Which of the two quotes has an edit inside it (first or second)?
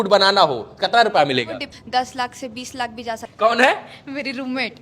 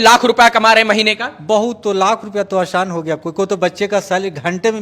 first